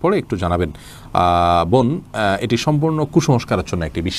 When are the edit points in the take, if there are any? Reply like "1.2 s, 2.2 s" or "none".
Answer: none

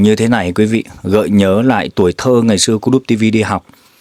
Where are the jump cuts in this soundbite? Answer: none

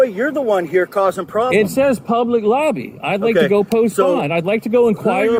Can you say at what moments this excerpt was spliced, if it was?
none

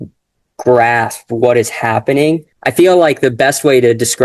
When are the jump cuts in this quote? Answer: 2.5 s

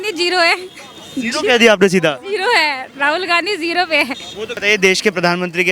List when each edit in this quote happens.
4.6 s

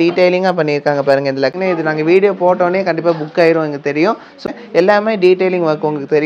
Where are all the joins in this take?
1.6 s, 4.4 s

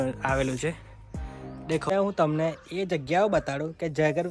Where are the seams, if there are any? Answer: 1.9 s

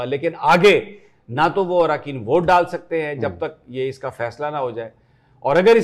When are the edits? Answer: none

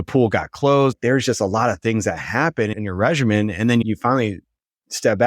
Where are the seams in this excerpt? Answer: 0.9 s, 2.7 s, 3.8 s

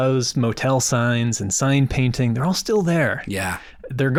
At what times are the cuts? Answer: none

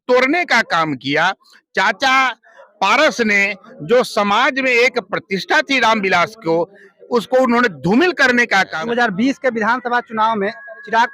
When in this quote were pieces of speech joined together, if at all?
8.8 s

